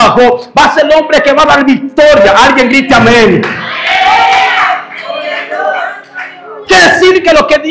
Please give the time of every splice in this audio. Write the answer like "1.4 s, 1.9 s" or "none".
none